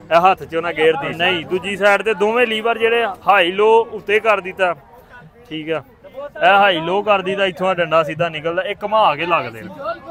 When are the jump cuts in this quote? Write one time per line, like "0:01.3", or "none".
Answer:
0:01.1